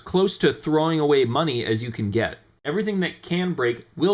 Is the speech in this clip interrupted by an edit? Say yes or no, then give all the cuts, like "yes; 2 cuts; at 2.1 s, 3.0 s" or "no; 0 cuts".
yes; 1 cut; at 2.5 s